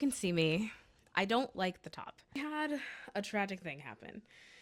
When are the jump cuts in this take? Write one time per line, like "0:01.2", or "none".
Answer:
0:02.4